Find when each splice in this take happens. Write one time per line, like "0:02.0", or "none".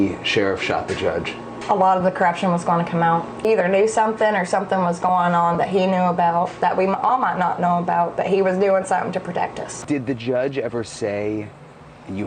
0:09.7

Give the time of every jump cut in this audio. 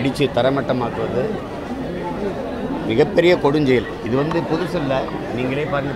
none

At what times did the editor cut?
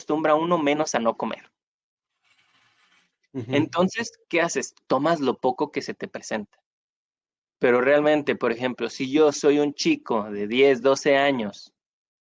none

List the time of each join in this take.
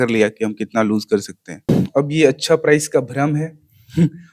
0:01.7

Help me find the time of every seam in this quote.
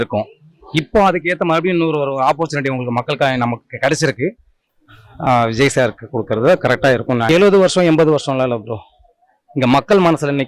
0:04.7
0:07.3

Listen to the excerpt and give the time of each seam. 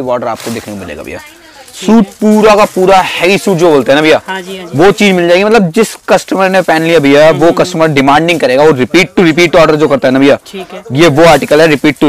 none

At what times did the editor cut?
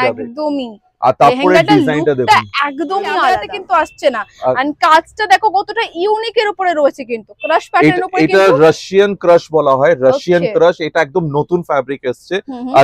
0:03.5

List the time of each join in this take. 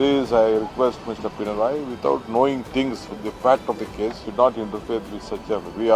0:04.2

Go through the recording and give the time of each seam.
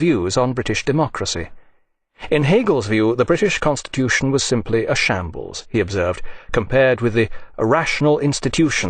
0:06.4

